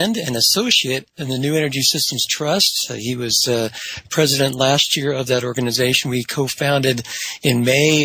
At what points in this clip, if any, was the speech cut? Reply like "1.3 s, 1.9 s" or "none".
none

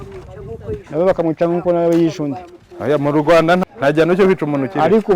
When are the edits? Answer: 3.6 s

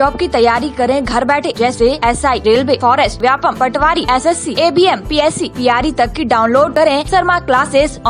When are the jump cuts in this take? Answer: none

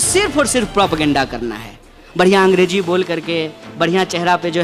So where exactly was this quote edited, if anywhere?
none

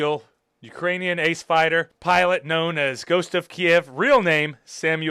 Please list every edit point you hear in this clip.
1.9 s

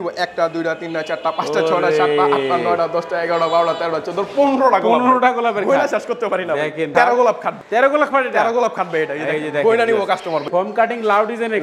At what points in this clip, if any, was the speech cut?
6.9 s, 7.5 s, 10.5 s

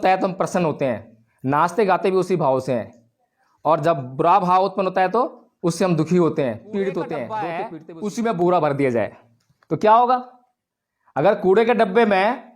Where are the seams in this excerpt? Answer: 7.6 s

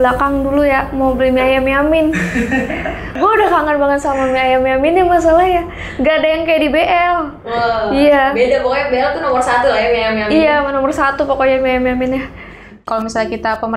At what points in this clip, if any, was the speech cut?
12.8 s

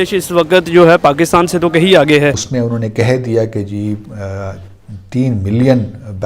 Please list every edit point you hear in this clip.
2.4 s

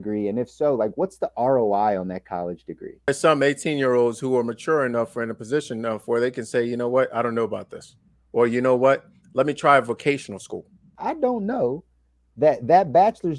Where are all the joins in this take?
3.1 s, 10.9 s

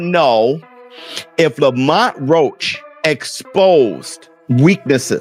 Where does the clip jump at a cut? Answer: none

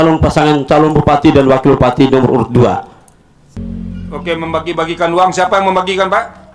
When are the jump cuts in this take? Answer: 3.5 s

